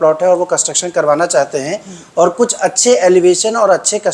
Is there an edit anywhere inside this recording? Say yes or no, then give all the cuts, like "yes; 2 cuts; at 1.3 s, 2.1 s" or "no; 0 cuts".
no; 0 cuts